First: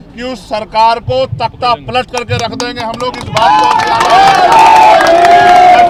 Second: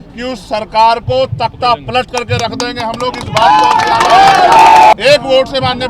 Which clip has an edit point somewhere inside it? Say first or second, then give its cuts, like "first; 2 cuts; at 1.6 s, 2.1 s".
second; 1 cut; at 4.9 s